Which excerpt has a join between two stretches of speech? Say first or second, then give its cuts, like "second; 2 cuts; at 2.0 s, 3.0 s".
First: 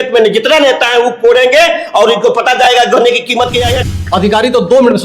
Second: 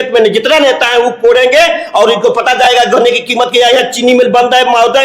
first; 1 cut; at 3.8 s